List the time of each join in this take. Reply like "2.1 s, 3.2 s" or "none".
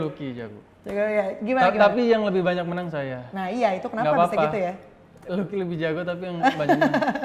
none